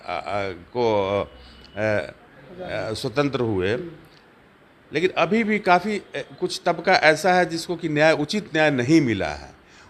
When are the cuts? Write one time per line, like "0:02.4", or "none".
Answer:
none